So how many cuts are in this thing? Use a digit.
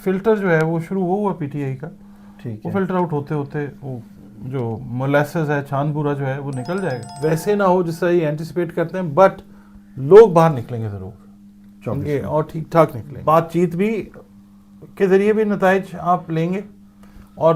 2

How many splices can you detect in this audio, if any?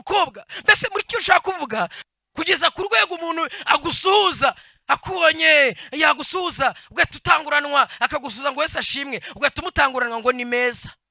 1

